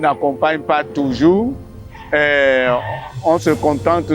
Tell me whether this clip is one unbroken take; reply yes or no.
yes